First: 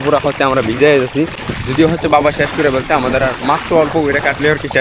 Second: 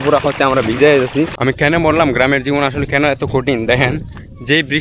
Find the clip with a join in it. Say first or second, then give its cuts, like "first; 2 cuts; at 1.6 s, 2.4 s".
second; 1 cut; at 1.3 s